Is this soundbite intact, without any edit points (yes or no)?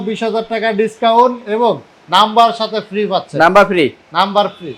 yes